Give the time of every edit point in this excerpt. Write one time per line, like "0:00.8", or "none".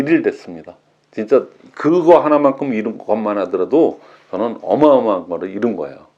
none